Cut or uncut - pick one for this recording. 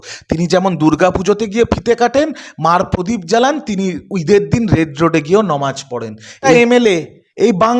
cut